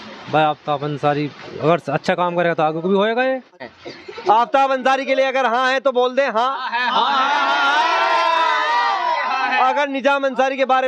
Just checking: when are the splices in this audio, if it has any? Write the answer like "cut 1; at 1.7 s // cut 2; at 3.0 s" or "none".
cut 1; at 3.6 s